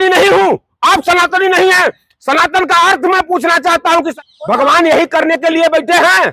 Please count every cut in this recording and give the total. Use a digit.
1